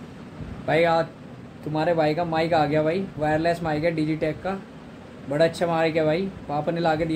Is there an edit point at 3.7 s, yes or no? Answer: no